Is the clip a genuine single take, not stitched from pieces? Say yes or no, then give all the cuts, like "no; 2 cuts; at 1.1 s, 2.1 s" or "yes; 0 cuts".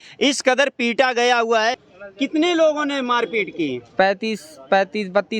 no; 1 cut; at 1.9 s